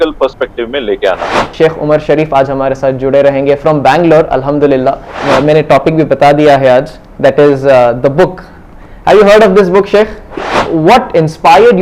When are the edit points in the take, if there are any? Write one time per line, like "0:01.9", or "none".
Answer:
0:01.4
0:05.2
0:10.5

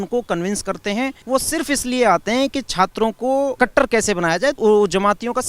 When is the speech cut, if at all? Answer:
0:01.2
0:03.5
0:04.6

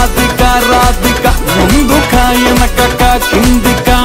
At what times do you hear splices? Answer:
none

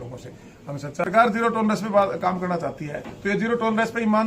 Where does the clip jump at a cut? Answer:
0:01.0

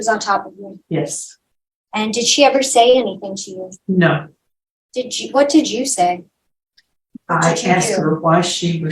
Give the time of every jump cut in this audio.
none

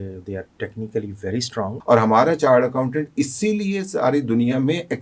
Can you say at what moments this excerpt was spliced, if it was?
0:01.8

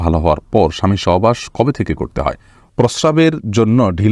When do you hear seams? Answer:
0:02.7

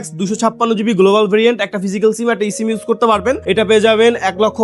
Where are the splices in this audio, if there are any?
0:03.4

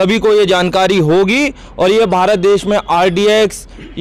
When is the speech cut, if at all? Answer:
none

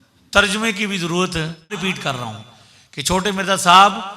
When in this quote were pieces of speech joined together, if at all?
0:01.8

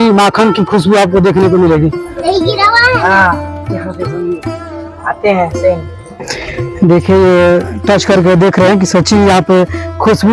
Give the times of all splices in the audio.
0:02.1

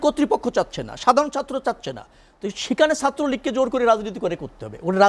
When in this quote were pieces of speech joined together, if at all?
none

